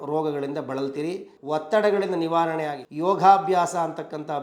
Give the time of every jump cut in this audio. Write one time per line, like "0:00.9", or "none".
0:01.3
0:02.8